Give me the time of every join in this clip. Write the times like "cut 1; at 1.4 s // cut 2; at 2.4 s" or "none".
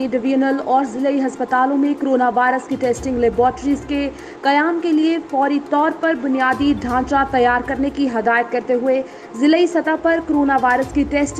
none